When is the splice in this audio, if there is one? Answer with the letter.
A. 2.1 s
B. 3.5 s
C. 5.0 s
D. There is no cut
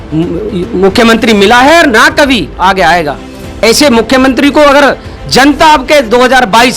B